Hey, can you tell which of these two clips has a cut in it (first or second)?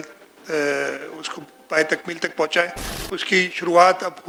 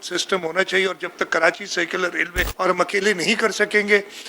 second